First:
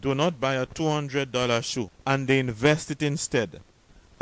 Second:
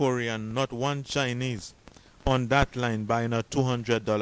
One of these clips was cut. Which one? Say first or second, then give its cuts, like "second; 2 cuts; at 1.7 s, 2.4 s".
first; 1 cut; at 1.9 s